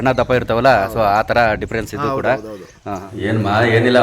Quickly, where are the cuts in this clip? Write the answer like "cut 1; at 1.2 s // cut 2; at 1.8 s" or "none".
cut 1; at 3.1 s